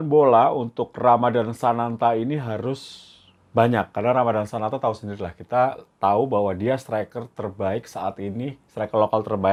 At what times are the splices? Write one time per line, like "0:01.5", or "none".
none